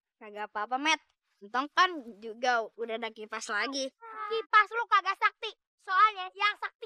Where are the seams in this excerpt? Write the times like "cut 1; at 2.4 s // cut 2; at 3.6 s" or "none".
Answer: cut 1; at 4.1 s